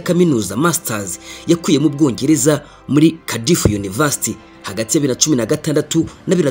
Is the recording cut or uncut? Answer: cut